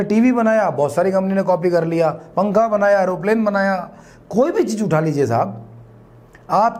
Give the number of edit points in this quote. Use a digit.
0